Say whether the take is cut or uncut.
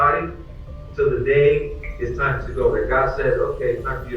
uncut